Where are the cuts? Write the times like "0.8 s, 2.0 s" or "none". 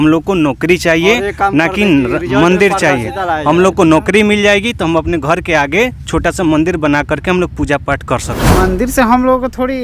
8.4 s